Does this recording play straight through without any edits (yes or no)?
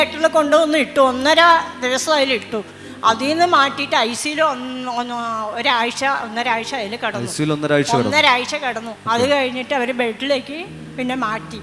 yes